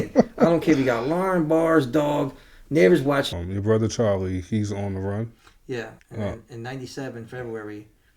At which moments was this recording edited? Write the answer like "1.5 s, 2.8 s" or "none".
3.3 s, 6.0 s